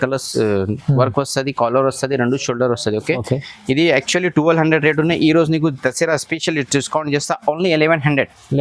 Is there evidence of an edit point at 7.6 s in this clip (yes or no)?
no